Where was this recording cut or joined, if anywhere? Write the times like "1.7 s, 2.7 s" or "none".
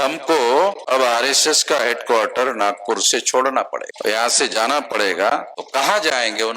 0.8 s, 3.9 s, 5.6 s